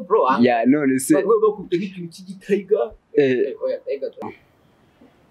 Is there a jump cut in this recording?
yes; 1 cut; at 4.2 s

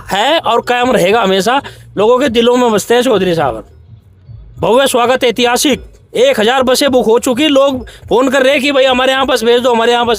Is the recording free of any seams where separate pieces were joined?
yes; 0 cuts

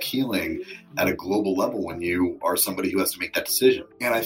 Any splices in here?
no; 0 cuts

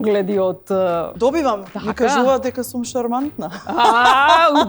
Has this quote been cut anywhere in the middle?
yes; 1 cut; at 1.1 s

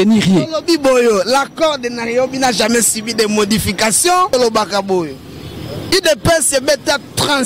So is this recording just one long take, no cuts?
no; 1 cut; at 4.3 s

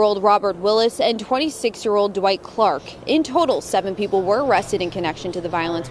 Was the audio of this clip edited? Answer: no; 0 cuts

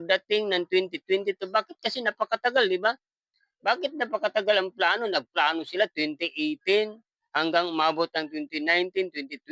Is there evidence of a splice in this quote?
no; 0 cuts

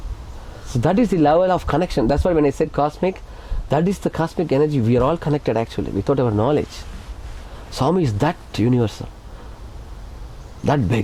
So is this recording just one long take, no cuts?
yes; 0 cuts

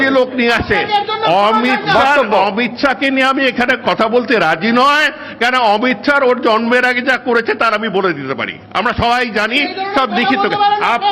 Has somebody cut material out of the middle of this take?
no; 0 cuts

